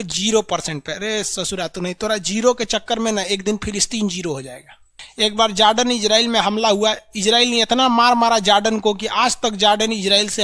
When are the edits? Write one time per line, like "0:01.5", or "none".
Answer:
0:05.0

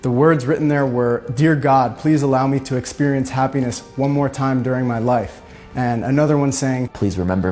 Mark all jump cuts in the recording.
none

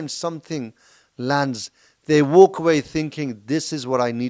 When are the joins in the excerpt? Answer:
none

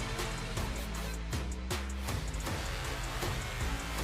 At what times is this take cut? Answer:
0:02.1

